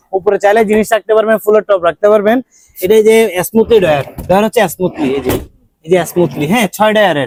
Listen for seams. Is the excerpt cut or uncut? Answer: uncut